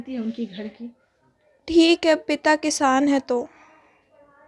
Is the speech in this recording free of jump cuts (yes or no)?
yes